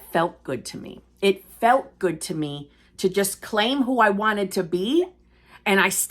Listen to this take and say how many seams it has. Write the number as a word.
zero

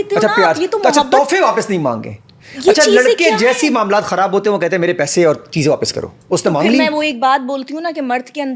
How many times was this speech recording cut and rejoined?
zero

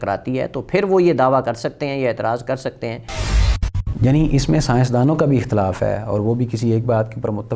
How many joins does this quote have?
one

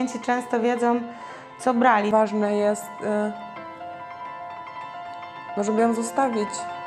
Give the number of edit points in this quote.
one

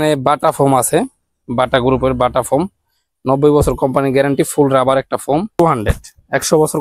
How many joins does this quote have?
one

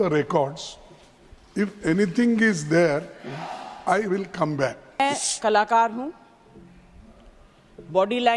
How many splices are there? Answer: one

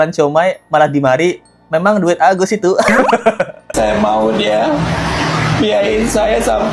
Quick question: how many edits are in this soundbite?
one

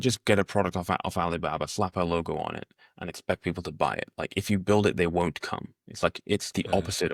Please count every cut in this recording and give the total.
zero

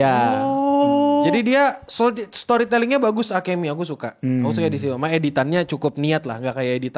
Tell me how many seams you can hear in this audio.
zero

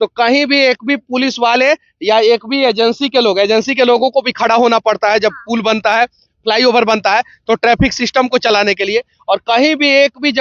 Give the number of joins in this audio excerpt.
zero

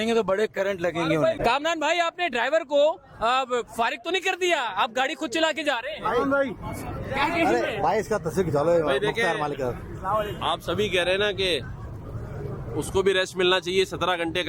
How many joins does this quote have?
one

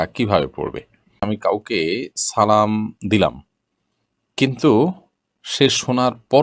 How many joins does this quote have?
one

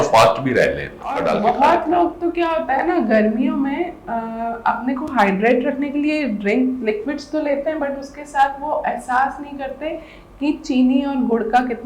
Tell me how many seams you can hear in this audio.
one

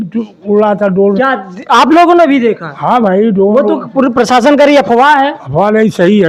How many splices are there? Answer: zero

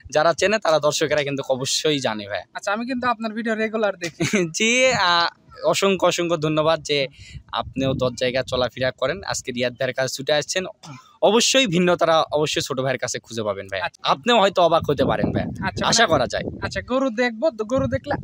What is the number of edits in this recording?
one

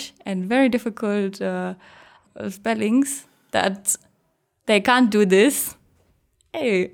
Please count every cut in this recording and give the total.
one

